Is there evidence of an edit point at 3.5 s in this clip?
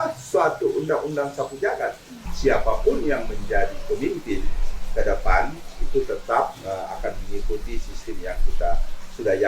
no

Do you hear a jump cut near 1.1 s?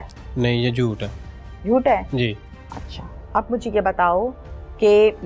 no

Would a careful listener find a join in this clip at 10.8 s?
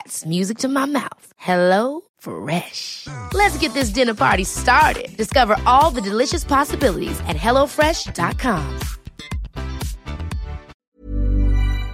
yes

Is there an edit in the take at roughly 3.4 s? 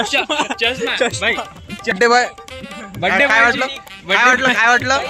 no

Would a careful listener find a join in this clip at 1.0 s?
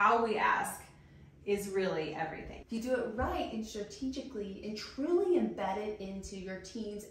no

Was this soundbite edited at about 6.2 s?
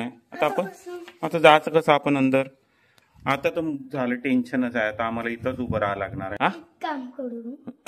yes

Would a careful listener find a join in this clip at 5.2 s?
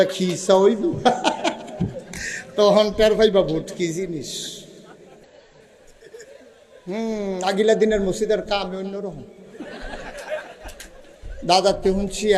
yes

